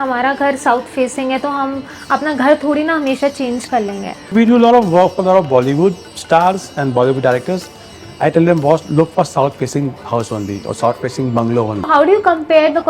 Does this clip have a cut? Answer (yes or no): yes